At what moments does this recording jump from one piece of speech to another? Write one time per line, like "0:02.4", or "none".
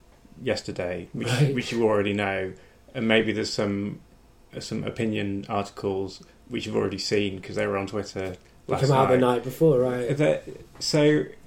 none